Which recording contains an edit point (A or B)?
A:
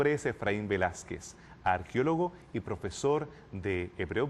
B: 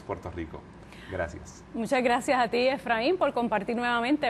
B